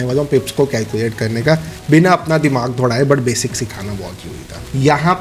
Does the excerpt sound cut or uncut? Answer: uncut